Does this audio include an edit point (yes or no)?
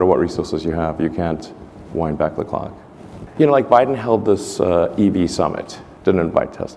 no